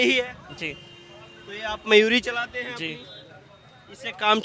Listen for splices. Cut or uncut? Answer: uncut